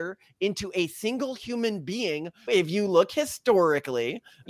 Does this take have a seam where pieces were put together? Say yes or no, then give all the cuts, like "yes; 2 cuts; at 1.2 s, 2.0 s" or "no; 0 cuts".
yes; 1 cut; at 2.5 s